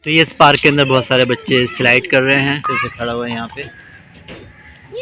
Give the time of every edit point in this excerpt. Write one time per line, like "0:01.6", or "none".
0:02.7